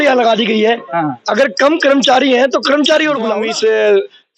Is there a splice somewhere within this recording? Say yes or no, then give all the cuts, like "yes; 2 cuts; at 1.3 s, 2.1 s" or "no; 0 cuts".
yes; 1 cut; at 3.4 s